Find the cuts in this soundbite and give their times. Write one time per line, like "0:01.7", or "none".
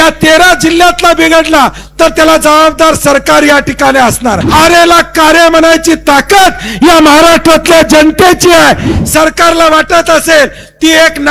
0:04.4
0:08.9